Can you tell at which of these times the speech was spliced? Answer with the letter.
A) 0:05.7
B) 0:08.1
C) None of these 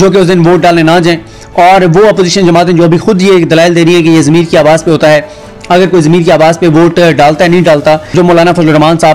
B